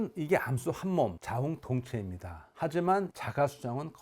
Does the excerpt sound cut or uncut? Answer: cut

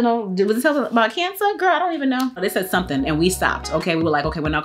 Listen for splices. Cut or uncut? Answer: uncut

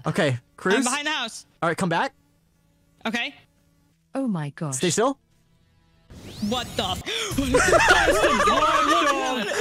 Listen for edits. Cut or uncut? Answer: cut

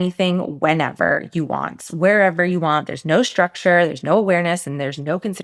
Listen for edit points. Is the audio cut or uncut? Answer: uncut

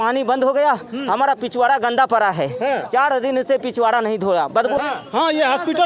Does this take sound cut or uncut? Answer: cut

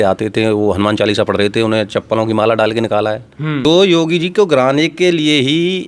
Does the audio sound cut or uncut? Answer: cut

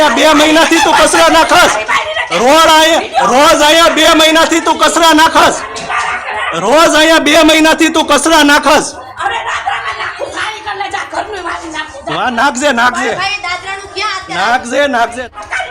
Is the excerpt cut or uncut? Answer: uncut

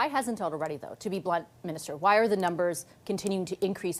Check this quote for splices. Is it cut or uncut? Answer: uncut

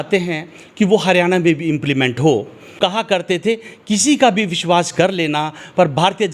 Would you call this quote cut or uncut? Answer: cut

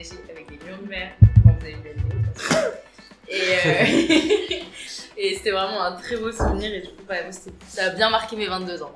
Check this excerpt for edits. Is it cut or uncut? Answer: uncut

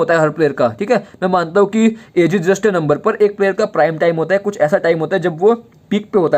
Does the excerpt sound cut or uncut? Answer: uncut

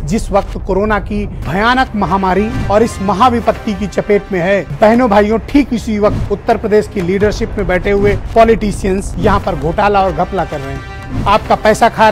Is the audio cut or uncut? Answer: uncut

